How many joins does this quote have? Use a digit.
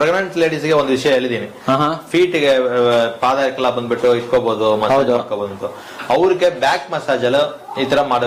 0